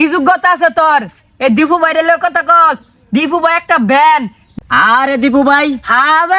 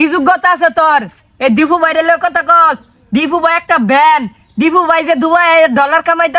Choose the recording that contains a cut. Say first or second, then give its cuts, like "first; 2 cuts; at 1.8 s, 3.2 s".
first; 1 cut; at 4.4 s